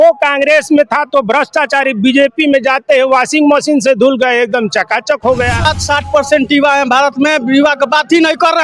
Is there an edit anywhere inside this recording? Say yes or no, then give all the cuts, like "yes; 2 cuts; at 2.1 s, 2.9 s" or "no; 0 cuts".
yes; 1 cut; at 5.7 s